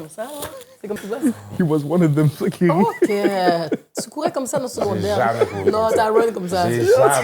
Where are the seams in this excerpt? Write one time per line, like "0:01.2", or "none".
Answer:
0:01.0